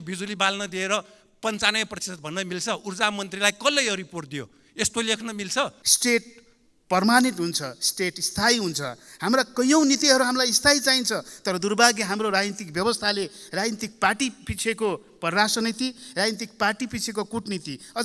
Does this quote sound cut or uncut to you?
cut